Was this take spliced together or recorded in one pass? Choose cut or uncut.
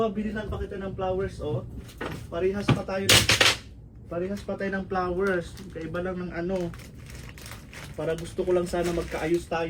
uncut